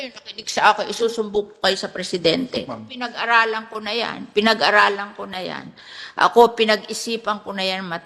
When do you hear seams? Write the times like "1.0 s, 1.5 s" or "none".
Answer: 2.8 s